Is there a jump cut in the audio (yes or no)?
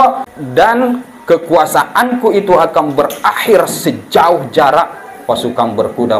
no